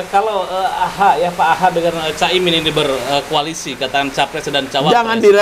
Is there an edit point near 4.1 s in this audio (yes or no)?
no